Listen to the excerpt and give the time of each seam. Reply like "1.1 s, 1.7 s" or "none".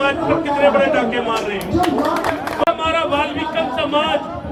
none